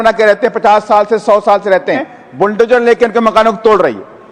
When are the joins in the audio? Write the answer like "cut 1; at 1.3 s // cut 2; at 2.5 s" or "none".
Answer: cut 1; at 2.1 s